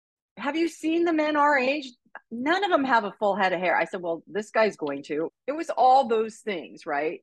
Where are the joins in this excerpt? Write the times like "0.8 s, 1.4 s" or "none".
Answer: 5.3 s